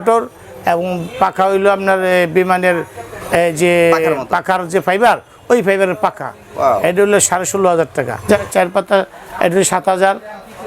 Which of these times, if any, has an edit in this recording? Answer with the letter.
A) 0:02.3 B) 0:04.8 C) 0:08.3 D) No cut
C